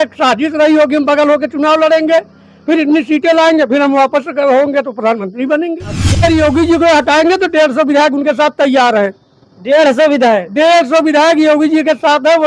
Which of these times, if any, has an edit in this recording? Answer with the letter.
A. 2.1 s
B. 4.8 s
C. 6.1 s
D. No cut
C